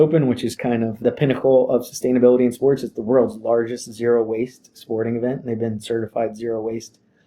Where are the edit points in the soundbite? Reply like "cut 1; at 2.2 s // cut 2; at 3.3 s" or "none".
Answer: cut 1; at 1.0 s